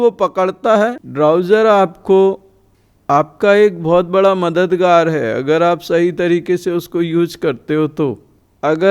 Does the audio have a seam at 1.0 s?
yes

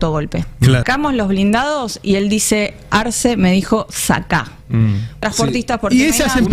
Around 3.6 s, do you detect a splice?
no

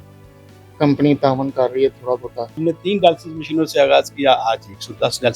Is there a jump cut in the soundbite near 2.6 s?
yes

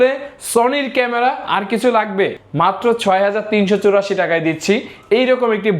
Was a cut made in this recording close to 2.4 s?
yes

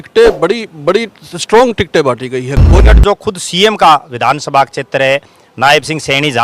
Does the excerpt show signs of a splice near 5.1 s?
no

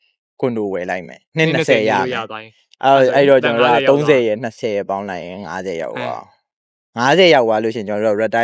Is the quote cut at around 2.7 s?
no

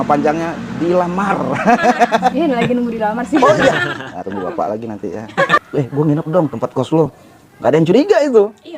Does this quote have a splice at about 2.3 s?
yes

